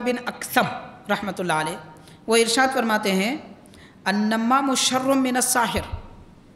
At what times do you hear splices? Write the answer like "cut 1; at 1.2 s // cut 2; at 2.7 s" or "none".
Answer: none